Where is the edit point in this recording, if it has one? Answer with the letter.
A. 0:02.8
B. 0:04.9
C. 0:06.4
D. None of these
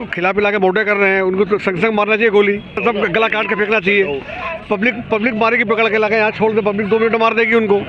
A